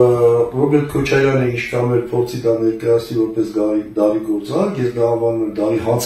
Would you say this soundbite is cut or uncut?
uncut